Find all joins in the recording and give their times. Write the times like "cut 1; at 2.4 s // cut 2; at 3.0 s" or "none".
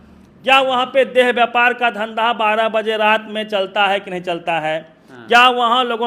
none